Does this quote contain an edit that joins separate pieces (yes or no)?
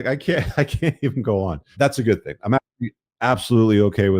yes